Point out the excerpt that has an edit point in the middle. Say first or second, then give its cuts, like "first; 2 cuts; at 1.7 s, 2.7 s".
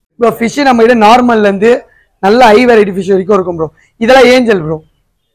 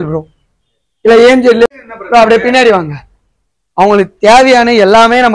second; 1 cut; at 1.7 s